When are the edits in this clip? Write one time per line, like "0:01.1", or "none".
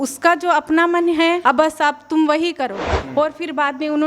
0:01.4
0:02.9